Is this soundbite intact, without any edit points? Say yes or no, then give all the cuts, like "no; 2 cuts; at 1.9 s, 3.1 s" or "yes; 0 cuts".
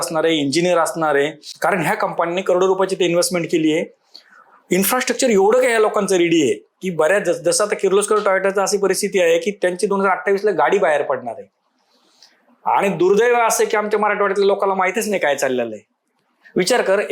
yes; 0 cuts